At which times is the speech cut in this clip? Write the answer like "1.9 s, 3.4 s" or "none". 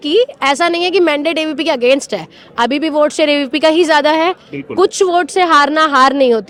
none